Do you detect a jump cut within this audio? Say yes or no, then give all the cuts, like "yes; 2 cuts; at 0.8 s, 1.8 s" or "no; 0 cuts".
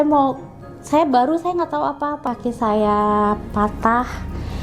yes; 1 cut; at 2.2 s